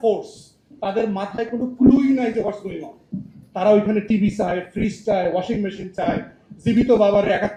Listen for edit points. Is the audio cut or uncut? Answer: uncut